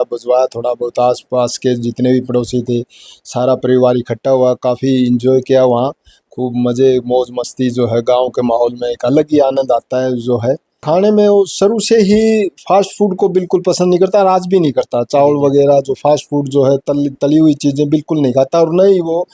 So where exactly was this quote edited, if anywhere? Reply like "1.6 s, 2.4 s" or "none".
10.7 s